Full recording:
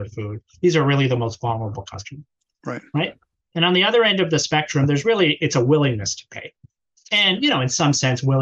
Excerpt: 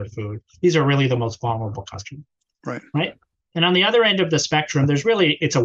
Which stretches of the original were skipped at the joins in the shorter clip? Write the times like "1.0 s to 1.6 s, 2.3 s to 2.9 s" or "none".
none

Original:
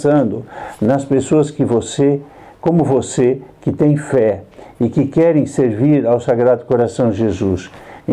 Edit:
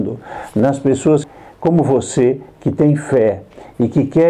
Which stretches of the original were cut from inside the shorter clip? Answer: 1.5 s to 2.3 s

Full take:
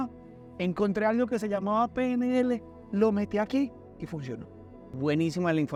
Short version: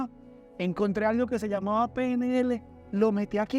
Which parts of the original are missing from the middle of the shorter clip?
none

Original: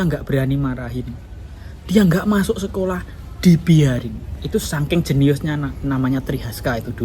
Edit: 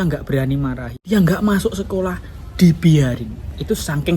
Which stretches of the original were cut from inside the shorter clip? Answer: 0.9 s to 1.7 s

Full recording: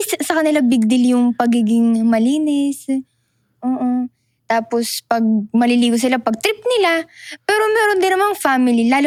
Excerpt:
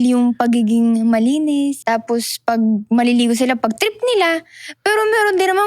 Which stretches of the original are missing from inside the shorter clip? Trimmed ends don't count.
2.8 s to 4.4 s

